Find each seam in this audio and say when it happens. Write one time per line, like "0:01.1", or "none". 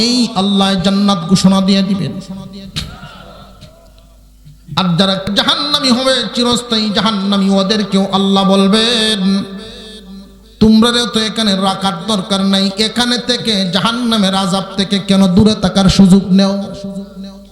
0:05.2